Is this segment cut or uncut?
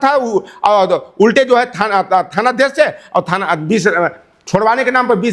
uncut